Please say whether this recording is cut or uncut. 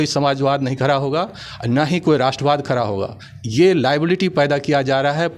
uncut